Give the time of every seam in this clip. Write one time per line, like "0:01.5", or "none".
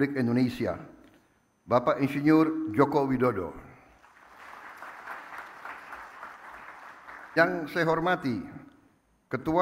0:07.4

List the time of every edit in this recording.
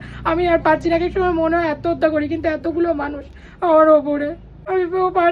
none

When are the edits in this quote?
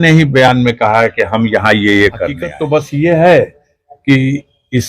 0:02.5

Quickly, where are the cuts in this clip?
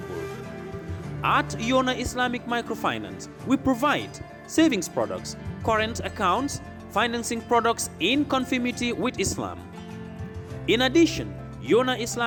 none

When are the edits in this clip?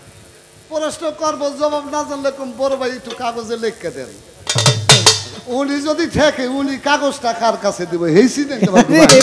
none

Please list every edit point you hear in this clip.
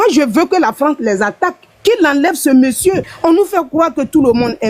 0:03.0

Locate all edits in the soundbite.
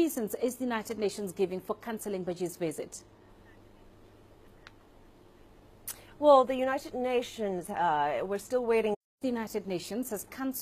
none

